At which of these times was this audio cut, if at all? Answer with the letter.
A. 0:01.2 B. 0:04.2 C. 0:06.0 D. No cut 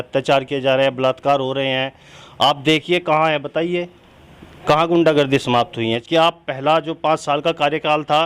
C